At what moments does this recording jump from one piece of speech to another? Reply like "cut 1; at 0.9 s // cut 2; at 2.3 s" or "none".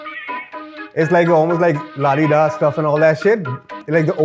none